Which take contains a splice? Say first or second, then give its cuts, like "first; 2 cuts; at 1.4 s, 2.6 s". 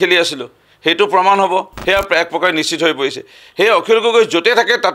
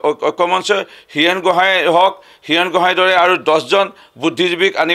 first; 1 cut; at 1.7 s